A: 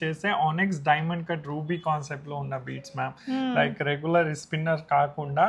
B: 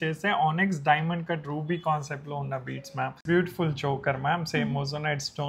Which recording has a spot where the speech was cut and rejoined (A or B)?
B